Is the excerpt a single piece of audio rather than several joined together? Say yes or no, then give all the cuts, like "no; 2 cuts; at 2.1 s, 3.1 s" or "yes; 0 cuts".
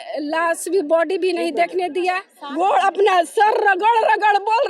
no; 1 cut; at 2.4 s